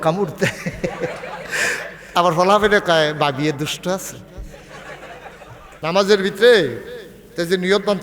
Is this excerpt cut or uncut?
cut